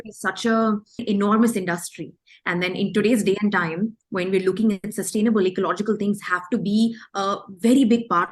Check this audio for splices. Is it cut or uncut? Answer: cut